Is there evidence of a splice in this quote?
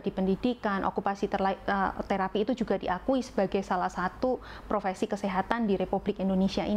no; 0 cuts

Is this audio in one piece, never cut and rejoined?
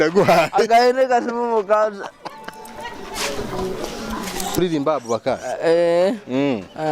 no; 1 cut; at 4.6 s

